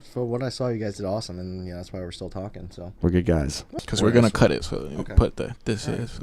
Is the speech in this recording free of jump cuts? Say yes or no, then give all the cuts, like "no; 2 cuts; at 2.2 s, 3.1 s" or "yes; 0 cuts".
no; 1 cut; at 3.7 s